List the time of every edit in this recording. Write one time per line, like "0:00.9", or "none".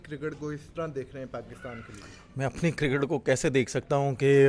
none